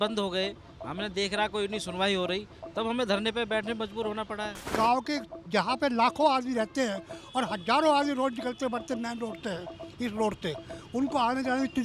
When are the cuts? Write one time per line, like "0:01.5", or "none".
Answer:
0:04.7